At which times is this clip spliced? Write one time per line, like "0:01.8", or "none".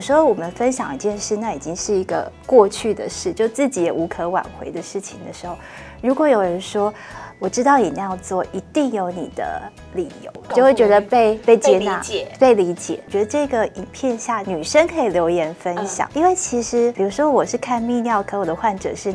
0:14.4
0:16.0
0:16.9